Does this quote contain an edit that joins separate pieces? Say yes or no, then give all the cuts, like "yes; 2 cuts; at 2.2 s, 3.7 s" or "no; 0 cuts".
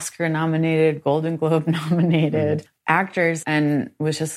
yes; 1 cut; at 3.2 s